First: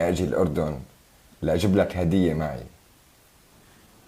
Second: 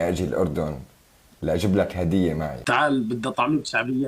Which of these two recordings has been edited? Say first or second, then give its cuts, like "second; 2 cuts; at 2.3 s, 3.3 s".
second; 1 cut; at 2.6 s